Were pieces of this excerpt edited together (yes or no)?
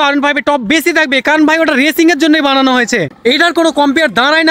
yes